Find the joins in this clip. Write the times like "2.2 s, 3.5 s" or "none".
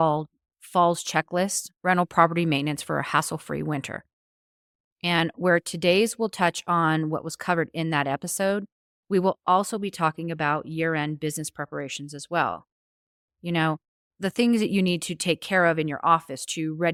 none